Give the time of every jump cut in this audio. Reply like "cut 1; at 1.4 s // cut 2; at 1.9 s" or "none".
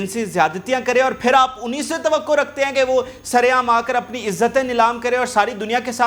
none